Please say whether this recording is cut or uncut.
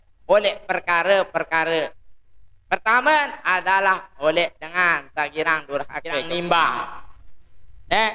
cut